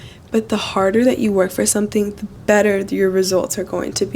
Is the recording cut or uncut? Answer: cut